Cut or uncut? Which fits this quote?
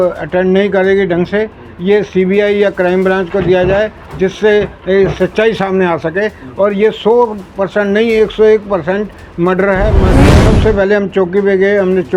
cut